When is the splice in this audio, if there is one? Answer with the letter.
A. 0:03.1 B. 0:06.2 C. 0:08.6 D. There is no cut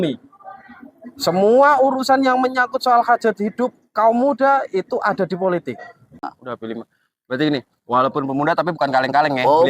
B